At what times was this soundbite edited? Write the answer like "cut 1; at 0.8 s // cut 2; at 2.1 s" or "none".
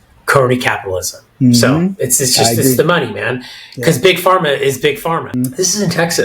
cut 1; at 5.3 s